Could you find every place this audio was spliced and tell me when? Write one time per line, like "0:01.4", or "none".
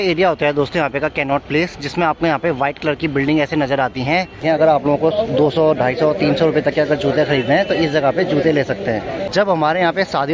0:04.4
0:09.3